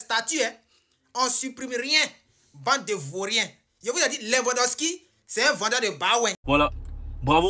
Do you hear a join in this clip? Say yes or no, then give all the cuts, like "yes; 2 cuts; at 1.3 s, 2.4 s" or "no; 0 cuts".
yes; 1 cut; at 6.4 s